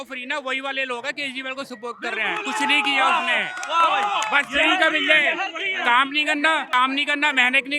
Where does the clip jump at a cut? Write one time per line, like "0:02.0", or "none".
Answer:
0:06.7